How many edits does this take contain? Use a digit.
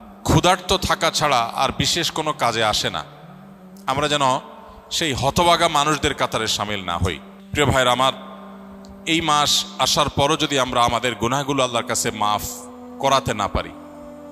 1